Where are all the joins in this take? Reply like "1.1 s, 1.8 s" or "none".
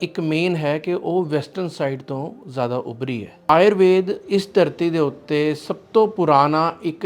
3.5 s